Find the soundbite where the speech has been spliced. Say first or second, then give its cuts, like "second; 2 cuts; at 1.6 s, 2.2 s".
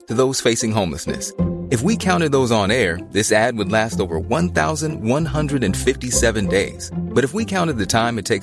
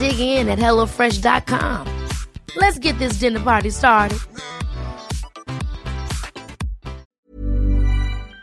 second; 1 cut; at 7.1 s